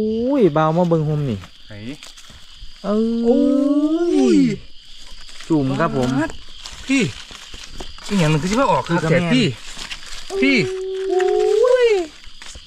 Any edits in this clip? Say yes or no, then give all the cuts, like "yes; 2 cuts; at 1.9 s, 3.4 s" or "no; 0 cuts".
no; 0 cuts